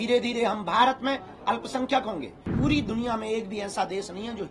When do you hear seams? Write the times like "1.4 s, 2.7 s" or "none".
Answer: 2.5 s

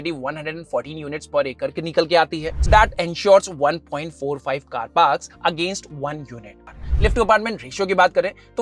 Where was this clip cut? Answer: 2.6 s, 6.7 s

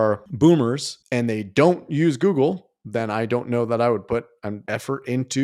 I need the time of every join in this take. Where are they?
4.5 s

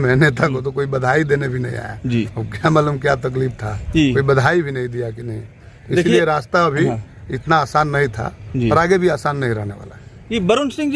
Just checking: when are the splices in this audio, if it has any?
none

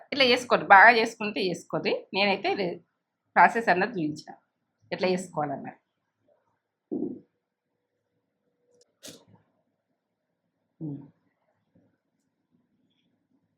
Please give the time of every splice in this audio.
8.6 s

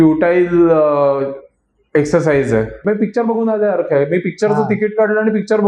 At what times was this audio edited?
2.8 s

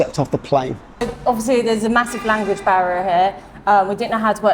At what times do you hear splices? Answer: 1.1 s

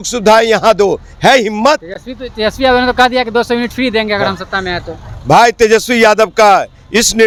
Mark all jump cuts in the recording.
none

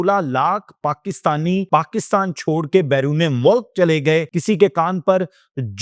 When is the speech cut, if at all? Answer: 1.7 s, 4.3 s

